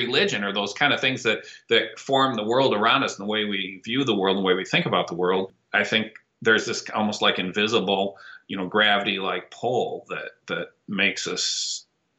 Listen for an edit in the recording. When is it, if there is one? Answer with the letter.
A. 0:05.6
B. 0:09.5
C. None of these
A